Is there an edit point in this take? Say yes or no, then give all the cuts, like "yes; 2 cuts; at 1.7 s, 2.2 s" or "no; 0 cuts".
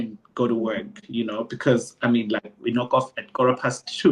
no; 0 cuts